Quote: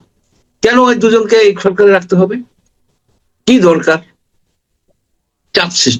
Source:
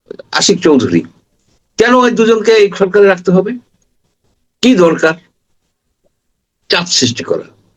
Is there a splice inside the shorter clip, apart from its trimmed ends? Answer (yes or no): no